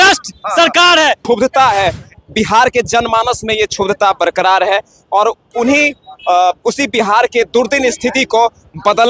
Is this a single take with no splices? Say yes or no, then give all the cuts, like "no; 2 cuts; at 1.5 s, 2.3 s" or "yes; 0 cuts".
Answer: no; 1 cut; at 1.2 s